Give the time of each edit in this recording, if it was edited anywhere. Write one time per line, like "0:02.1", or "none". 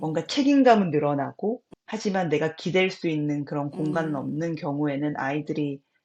0:01.7